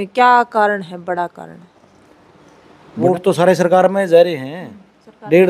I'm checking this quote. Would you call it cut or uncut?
cut